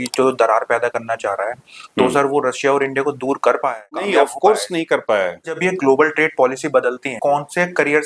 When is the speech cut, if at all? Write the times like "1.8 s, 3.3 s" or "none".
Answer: 4.0 s, 5.6 s, 7.1 s